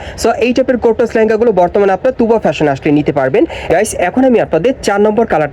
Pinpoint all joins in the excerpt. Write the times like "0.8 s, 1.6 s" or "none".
3.6 s